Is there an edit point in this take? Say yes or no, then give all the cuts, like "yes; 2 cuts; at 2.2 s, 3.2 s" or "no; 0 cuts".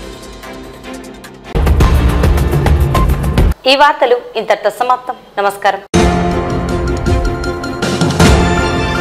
no; 0 cuts